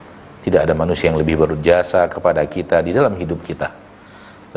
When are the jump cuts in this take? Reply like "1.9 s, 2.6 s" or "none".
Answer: none